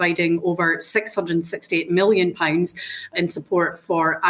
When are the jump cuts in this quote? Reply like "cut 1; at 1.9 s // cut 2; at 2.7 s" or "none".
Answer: none